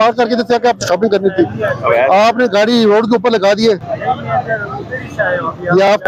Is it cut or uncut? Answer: uncut